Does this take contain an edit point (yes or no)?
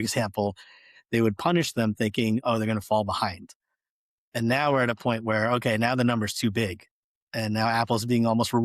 no